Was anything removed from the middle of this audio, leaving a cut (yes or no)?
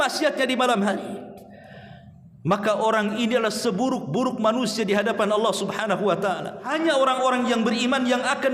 yes